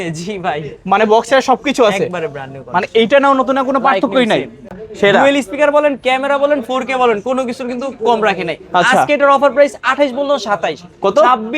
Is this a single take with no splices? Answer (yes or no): no